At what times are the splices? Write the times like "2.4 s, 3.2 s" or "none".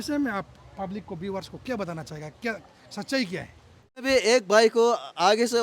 4.0 s